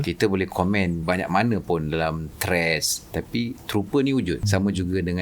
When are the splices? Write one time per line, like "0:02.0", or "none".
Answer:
0:01.0
0:04.4